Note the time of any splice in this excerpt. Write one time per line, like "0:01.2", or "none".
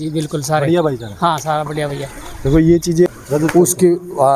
0:03.1